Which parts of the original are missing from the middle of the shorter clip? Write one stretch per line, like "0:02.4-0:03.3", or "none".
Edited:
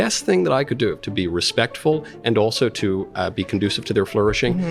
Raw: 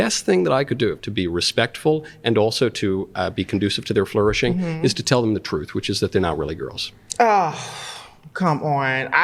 none